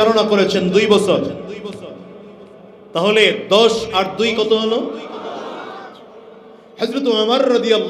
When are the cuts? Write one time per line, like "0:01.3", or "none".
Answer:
none